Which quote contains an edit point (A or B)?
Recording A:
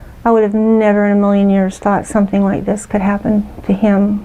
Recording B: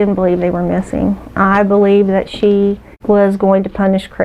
B